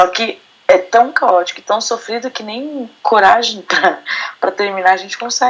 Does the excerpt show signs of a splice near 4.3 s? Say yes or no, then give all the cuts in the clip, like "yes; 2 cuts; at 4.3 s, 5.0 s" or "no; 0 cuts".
no; 1 cut; at 2.9 s